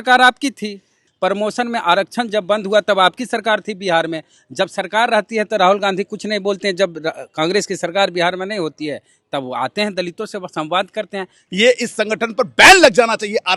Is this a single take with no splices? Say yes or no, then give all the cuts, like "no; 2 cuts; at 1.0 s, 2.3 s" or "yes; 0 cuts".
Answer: no; 2 cuts; at 1.0 s, 11.4 s